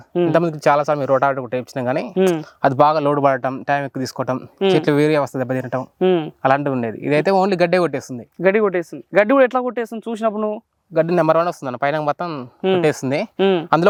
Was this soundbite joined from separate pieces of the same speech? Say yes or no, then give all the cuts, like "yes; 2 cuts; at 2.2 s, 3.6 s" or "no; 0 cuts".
no; 0 cuts